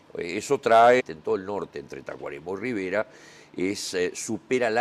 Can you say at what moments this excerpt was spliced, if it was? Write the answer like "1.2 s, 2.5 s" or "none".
none